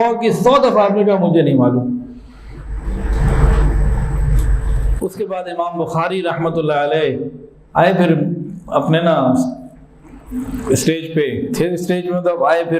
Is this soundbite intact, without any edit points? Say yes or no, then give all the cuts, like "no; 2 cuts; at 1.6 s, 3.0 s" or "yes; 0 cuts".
yes; 0 cuts